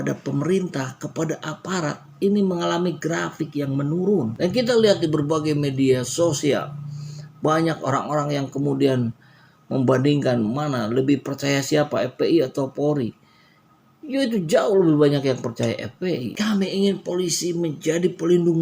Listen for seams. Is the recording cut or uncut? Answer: cut